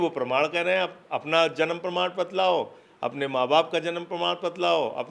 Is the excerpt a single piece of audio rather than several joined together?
yes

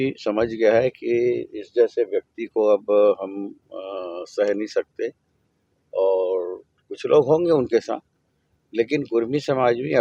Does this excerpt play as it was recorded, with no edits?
yes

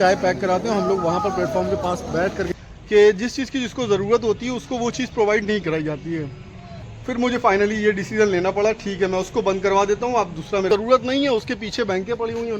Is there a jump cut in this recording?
yes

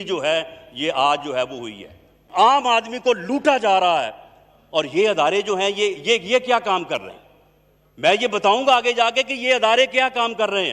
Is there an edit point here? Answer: yes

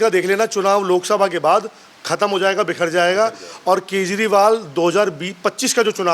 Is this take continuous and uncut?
yes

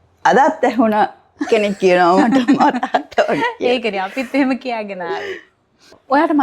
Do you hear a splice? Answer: no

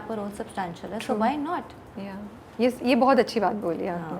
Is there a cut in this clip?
no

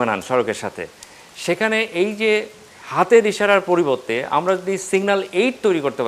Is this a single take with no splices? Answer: yes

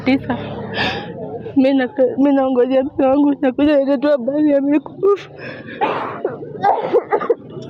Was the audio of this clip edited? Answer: no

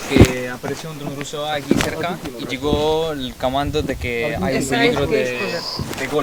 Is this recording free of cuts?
yes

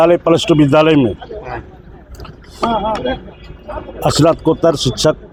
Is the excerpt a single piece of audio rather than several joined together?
yes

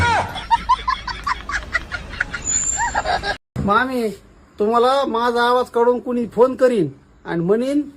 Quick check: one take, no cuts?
no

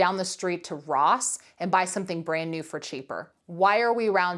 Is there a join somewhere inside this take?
yes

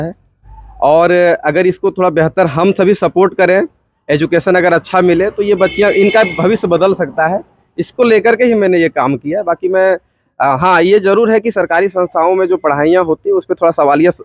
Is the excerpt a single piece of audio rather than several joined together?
yes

